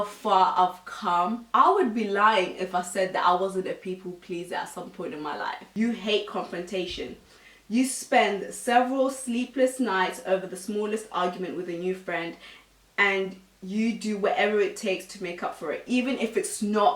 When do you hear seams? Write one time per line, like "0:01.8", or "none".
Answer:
0:05.7